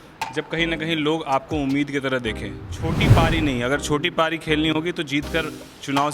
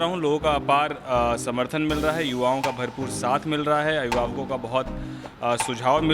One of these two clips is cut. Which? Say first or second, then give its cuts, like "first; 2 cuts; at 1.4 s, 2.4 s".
first; 1 cut; at 3.0 s